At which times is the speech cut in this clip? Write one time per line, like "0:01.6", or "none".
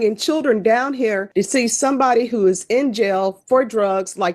0:01.2